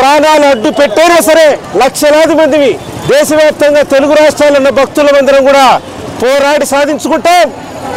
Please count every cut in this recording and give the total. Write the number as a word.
one